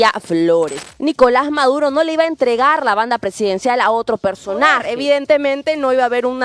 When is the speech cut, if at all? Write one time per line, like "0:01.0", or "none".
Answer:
0:00.8
0:04.9